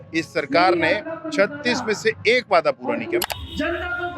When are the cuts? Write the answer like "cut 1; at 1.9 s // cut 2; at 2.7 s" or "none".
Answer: cut 1; at 3.2 s